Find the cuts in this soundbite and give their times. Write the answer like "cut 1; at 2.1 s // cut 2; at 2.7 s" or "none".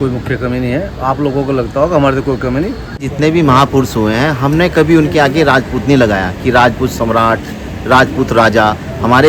cut 1; at 2.9 s